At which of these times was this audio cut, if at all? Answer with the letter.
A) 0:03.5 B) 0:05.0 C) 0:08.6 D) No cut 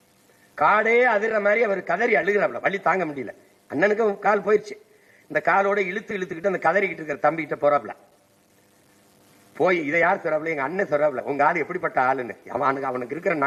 D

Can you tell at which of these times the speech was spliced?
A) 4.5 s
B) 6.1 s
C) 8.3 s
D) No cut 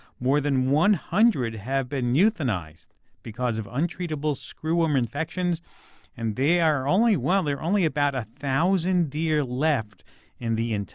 D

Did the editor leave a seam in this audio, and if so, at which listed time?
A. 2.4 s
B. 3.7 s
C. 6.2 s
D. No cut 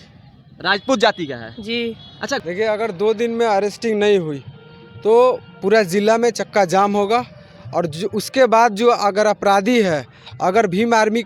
A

